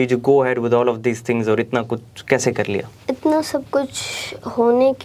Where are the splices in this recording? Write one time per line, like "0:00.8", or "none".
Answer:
0:02.9